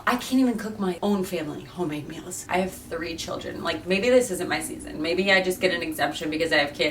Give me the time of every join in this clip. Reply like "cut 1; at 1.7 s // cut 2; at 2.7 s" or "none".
cut 1; at 1.0 s // cut 2; at 2.3 s